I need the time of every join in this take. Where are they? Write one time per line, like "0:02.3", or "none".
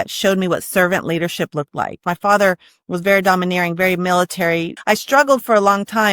0:02.0
0:04.7